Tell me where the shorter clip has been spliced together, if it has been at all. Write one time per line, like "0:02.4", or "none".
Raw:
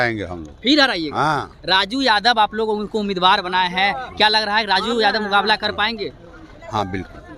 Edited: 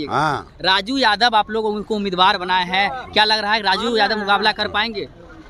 none